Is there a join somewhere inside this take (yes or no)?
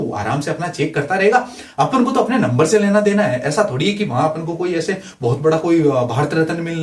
no